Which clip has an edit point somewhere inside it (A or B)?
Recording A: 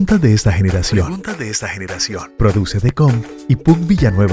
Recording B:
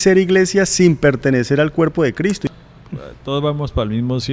B